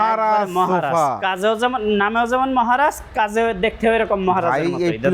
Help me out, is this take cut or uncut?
uncut